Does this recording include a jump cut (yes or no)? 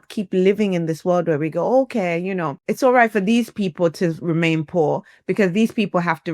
yes